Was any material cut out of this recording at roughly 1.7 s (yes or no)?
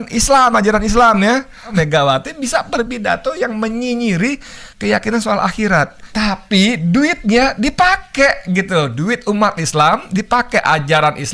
yes